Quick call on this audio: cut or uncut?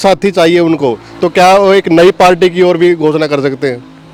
uncut